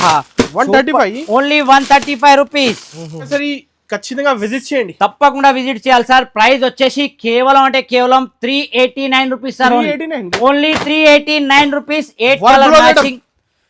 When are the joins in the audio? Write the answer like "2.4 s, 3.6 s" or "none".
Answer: 3.3 s